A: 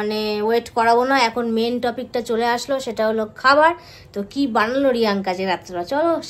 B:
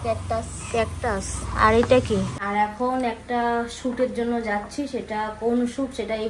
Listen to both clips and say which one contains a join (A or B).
B